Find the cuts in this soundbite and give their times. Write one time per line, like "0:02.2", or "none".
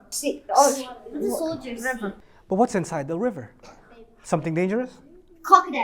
0:02.3

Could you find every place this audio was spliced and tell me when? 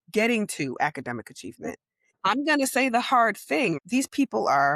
0:02.0
0:03.8

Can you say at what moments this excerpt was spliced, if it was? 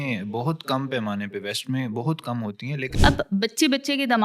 0:02.9

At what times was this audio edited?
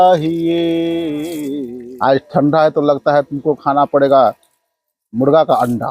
0:01.5

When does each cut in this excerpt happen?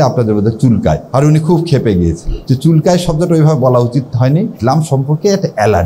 0:01.0
0:02.3
0:04.6

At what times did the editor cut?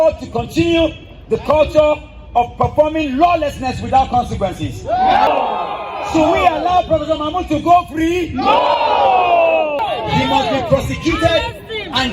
0:05.3
0:09.8

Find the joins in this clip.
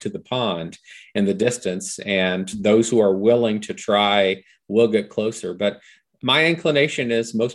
0:06.1

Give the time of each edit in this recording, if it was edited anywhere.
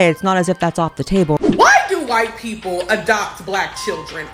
0:01.4

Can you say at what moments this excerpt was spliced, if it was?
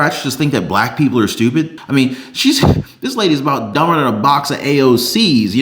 0:01.8

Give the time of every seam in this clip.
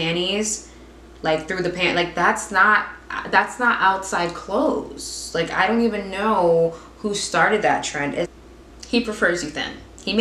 0:08.4

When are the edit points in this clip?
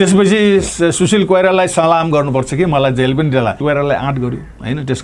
0:03.6

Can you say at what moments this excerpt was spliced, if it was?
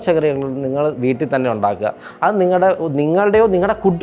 none

